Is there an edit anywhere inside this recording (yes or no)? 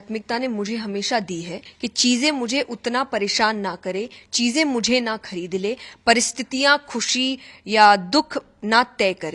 yes